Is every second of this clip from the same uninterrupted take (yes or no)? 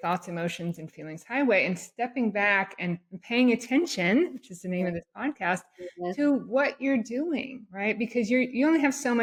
yes